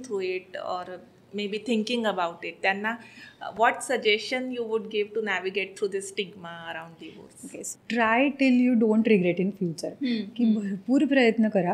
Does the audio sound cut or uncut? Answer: cut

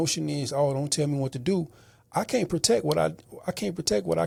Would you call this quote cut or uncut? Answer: uncut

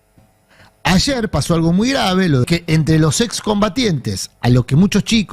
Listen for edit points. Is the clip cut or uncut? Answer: cut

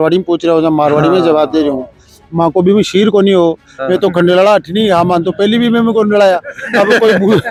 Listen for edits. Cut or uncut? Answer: uncut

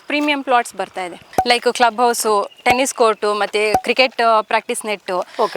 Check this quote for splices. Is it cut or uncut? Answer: cut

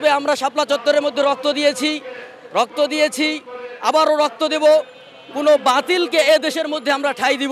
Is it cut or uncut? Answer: uncut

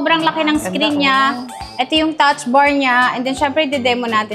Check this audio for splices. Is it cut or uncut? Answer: uncut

